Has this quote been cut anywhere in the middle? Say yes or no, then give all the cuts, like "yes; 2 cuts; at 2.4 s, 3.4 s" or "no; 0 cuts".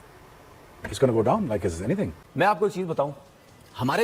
yes; 1 cut; at 2.2 s